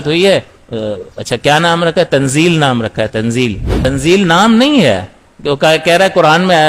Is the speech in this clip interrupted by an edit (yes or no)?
yes